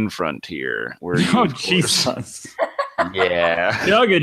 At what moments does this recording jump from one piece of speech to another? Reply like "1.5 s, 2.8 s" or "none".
0.9 s